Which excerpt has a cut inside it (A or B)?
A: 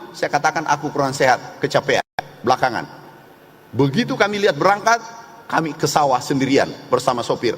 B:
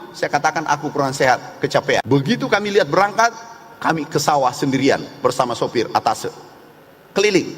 B